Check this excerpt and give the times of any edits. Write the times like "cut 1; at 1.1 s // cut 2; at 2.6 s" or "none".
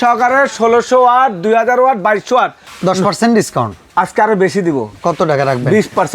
cut 1; at 2.6 s // cut 2; at 3.8 s